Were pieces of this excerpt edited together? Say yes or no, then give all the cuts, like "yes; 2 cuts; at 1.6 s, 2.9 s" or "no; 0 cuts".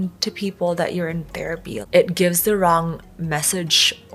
no; 0 cuts